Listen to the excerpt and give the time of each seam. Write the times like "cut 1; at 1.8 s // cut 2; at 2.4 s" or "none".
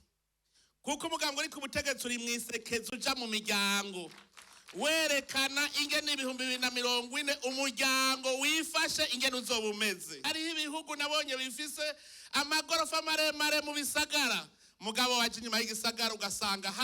cut 1; at 10.2 s